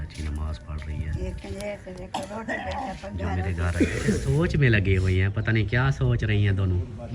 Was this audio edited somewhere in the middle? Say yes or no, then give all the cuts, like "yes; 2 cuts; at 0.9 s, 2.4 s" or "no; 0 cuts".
yes; 1 cut; at 3.7 s